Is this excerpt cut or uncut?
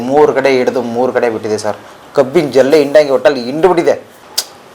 uncut